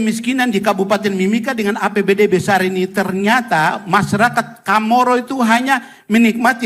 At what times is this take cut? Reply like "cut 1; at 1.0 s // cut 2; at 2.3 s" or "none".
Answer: none